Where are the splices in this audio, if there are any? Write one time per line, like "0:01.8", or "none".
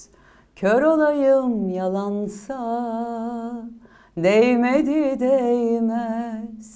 none